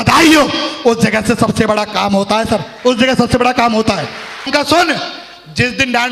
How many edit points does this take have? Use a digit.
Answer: 1